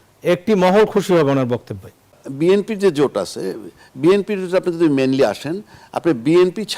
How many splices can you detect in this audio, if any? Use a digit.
1